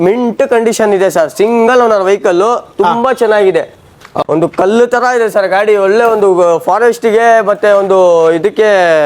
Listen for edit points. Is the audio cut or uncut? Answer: cut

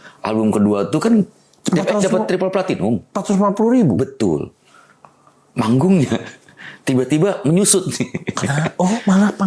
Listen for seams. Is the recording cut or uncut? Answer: uncut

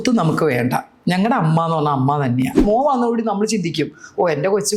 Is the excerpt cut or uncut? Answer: cut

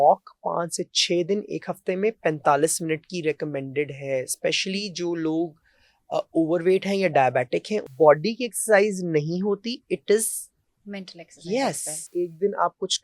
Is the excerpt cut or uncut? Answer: cut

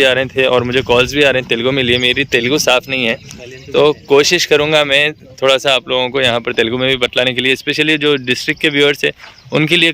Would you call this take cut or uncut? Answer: uncut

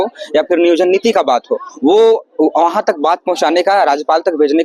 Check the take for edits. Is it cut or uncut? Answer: uncut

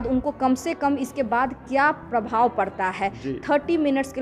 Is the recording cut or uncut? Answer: uncut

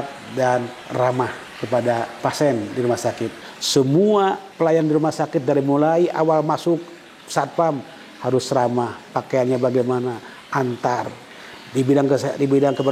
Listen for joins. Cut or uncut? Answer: cut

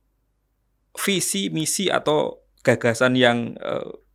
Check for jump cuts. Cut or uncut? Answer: uncut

